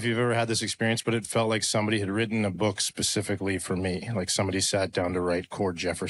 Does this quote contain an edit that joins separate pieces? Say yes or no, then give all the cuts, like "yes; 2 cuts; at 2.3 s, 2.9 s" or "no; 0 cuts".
no; 0 cuts